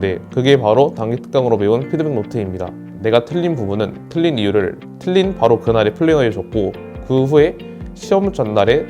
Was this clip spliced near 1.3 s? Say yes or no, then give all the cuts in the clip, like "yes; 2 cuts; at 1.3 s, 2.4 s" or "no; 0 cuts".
no; 1 cut; at 2.9 s